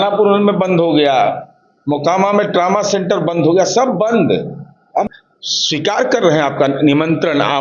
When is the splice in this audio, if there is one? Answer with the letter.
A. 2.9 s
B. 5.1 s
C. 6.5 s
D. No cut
B